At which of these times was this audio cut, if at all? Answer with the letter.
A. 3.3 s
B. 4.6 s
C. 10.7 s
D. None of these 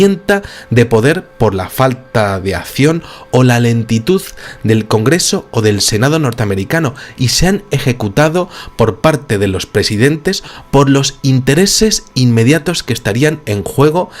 C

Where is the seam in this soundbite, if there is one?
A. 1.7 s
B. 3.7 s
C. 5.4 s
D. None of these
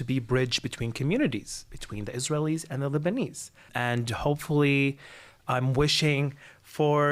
B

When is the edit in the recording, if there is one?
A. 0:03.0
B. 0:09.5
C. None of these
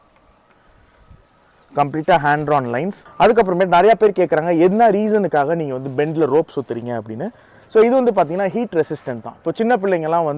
A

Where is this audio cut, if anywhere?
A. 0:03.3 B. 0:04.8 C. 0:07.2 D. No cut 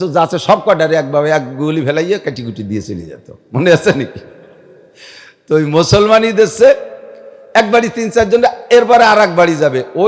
D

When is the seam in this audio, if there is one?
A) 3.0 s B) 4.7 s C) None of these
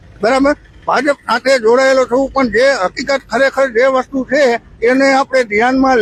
C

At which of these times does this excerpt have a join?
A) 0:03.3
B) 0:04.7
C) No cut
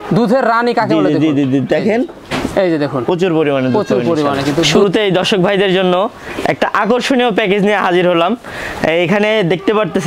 B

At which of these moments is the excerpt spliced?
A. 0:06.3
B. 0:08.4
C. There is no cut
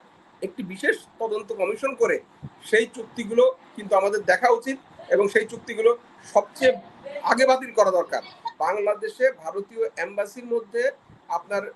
B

